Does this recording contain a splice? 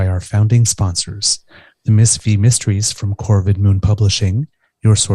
no; 0 cuts

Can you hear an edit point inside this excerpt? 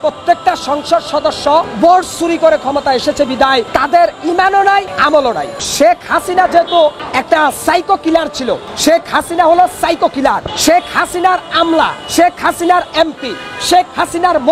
yes; 7 cuts; at 1.7 s, 3.7 s, 5.1 s, 7.1 s, 8.7 s, 10.5 s, 12.0 s

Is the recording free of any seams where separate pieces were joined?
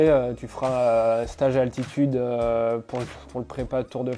yes; 0 cuts

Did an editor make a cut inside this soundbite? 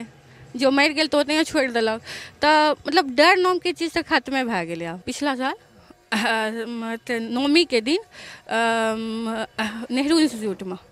yes; 1 cut; at 5.0 s

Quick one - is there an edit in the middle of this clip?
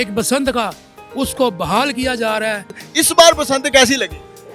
yes; 1 cut; at 2.9 s

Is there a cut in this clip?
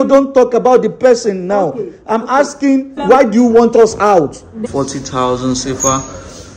yes; 2 cuts; at 3.0 s, 4.7 s

